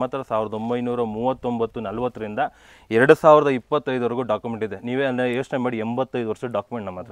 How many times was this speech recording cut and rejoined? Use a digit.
0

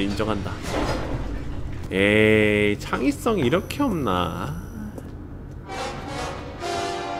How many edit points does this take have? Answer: 1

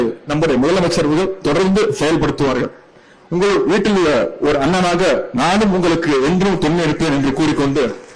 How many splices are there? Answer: 0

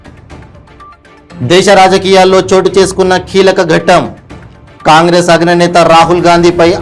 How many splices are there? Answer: 1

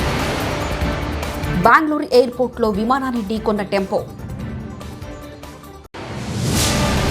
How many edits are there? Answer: 2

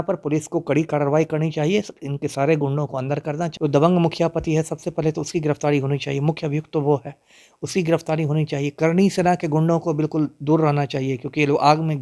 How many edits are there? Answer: 1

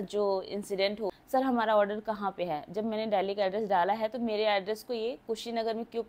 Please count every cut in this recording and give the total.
1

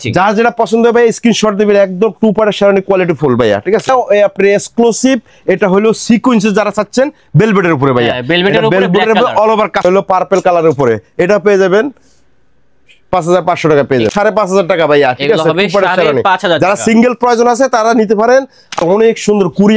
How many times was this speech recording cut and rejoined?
4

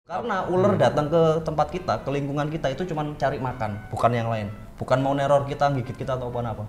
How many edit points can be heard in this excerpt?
0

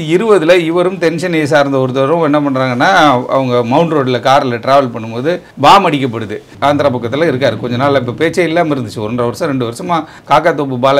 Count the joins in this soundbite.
1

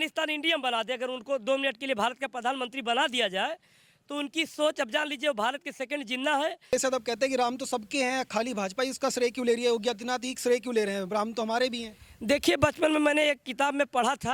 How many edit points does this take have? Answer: 1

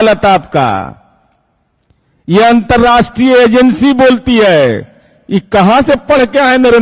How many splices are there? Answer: 0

